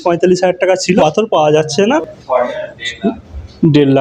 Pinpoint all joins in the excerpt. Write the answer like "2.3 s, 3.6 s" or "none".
1.0 s, 2.0 s